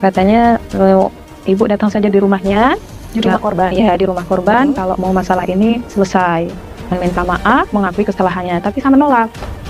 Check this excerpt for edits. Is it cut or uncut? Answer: cut